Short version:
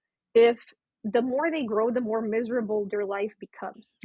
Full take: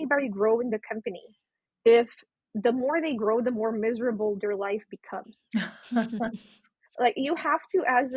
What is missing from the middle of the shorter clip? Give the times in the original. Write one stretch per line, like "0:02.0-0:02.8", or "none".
none